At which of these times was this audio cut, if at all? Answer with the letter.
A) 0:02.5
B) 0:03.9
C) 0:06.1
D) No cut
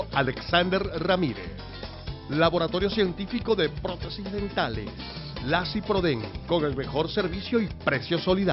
D